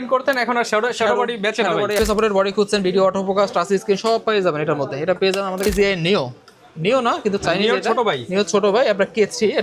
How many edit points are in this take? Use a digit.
2